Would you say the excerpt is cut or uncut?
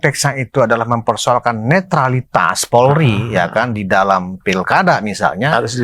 cut